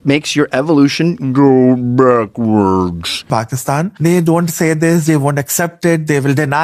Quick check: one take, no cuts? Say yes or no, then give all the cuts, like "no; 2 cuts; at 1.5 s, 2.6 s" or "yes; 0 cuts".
no; 1 cut; at 3.2 s